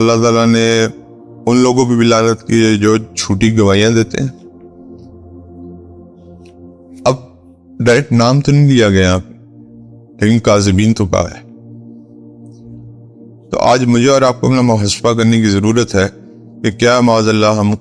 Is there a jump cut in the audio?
no; 0 cuts

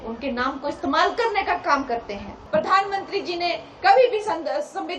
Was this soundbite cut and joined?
yes; 1 cut; at 2.4 s

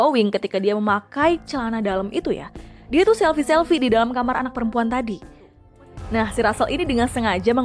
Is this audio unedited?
no; 1 cut; at 5.6 s

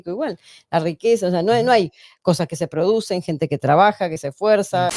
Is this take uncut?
yes; 0 cuts

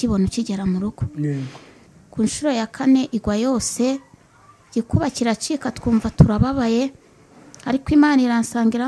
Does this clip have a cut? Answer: yes; 1 cut; at 1.9 s

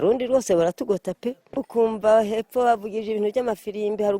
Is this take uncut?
no; 1 cut; at 1.6 s

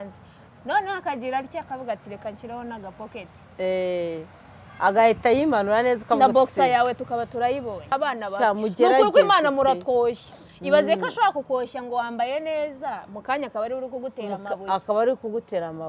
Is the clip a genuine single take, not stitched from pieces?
no; 1 cut; at 7.9 s

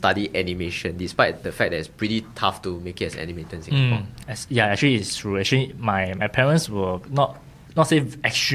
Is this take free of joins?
yes; 0 cuts

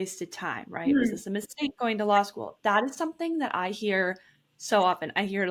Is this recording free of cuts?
yes; 0 cuts

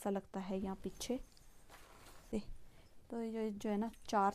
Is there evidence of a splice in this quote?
yes; 1 cut; at 2.3 s

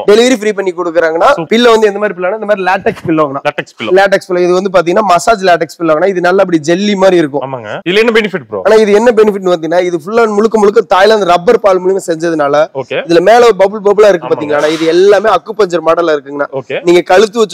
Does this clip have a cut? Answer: yes; 1 cut; at 1.4 s

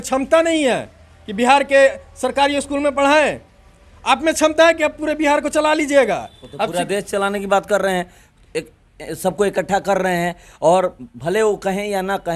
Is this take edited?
no; 0 cuts

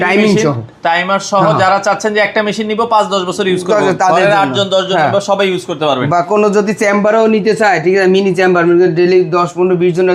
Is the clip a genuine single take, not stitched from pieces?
yes; 0 cuts

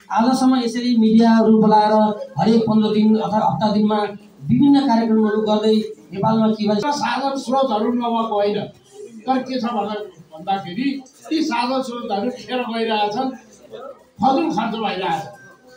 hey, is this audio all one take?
no; 1 cut; at 6.8 s

